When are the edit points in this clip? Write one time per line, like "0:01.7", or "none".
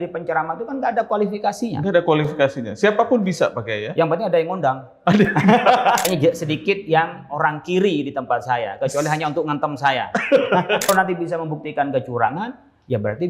0:06.0
0:10.9